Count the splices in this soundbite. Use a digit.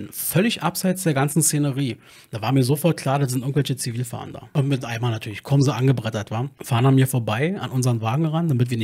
2